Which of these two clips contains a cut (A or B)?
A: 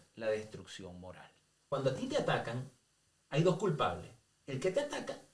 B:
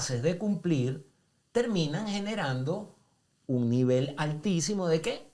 A